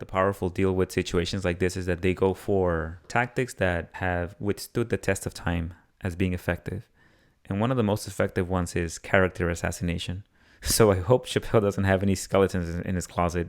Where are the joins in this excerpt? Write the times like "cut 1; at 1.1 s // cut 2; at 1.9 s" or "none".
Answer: cut 1; at 3.1 s // cut 2; at 3.9 s